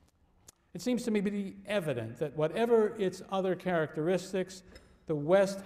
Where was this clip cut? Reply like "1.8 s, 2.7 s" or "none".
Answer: 1.9 s